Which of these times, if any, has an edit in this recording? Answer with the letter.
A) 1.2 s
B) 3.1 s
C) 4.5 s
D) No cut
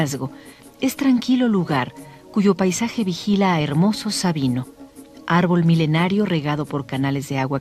B